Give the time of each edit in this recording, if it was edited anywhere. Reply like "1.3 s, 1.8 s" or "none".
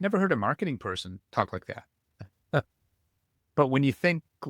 1.1 s